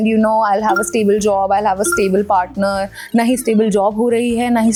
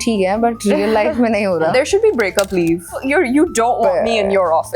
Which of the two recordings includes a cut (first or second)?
second